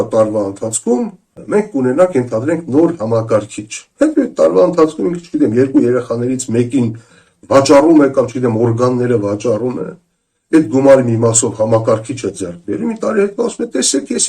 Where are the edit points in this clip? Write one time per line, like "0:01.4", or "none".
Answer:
0:01.3